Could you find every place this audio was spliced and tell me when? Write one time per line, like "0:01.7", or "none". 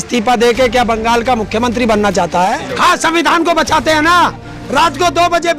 0:02.7